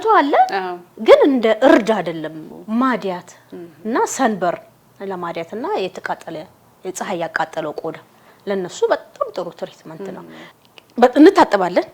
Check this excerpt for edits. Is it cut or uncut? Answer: cut